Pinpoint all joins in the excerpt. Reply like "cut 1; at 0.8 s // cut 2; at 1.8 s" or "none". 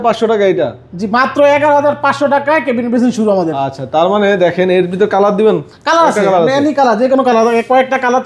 none